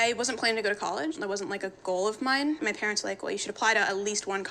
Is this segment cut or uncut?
cut